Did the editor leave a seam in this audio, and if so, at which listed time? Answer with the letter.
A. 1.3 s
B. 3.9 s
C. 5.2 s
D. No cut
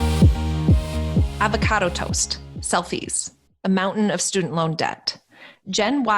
A